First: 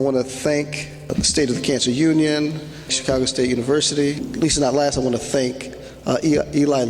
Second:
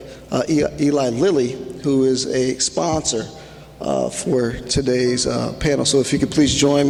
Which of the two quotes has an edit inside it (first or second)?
first